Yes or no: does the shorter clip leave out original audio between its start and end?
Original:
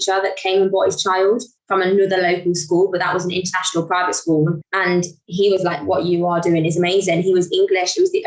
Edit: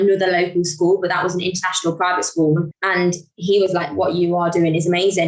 no